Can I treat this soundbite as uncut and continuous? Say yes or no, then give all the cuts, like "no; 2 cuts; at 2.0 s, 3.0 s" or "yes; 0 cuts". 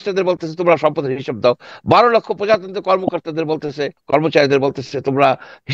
no; 1 cut; at 4.0 s